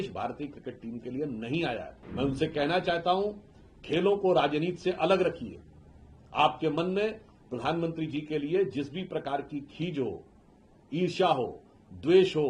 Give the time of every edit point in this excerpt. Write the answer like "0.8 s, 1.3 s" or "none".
2.0 s